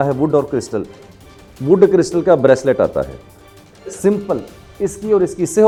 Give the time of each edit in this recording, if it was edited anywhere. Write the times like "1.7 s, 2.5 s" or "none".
none